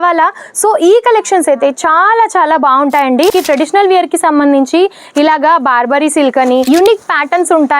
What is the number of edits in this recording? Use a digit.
2